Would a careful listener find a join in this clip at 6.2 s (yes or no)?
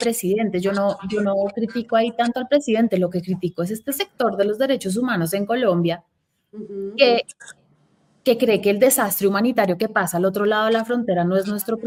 no